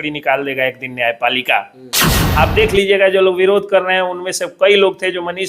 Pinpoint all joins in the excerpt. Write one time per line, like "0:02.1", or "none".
0:02.2